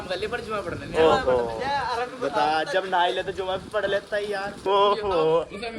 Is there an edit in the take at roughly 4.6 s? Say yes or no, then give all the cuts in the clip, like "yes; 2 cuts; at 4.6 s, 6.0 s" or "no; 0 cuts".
yes; 1 cut; at 4.6 s